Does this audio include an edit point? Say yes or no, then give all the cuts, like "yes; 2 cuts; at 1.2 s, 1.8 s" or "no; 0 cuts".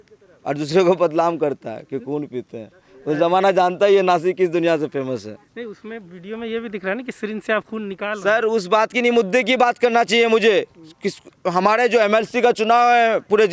no; 0 cuts